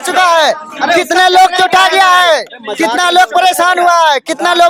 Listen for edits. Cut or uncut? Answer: uncut